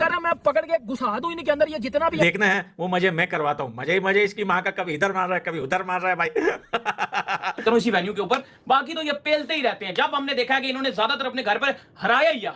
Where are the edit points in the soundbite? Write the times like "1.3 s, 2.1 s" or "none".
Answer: 2.2 s, 7.6 s